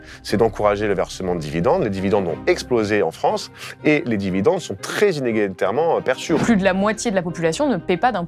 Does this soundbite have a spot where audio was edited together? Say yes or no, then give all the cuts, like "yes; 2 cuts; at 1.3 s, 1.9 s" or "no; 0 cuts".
yes; 1 cut; at 6.4 s